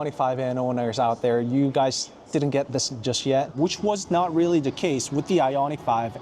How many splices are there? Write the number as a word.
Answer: one